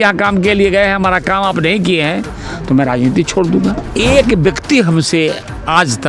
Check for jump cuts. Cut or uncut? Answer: cut